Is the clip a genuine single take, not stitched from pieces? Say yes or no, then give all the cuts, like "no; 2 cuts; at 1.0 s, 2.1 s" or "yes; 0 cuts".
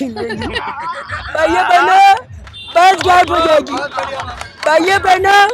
yes; 0 cuts